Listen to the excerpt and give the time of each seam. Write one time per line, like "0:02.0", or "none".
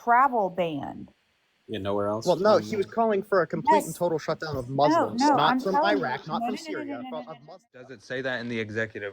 0:08.0